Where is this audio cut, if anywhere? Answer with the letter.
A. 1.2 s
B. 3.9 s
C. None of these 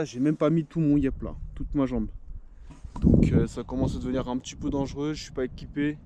C